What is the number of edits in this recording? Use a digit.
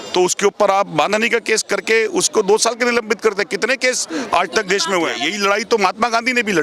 1